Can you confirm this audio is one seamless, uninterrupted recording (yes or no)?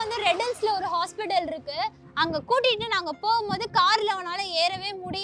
no